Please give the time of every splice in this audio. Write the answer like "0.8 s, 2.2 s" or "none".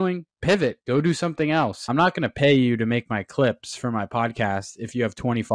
1.8 s